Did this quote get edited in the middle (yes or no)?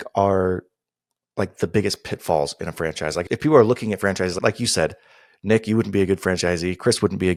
no